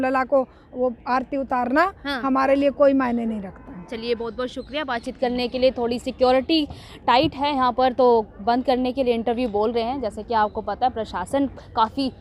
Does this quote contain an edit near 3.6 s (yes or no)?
no